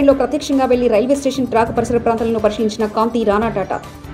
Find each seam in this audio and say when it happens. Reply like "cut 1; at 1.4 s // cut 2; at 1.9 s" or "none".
none